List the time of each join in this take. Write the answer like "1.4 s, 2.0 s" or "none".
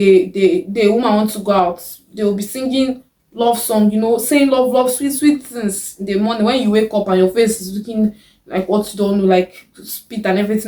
none